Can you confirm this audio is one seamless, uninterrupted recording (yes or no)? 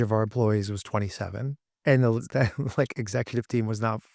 no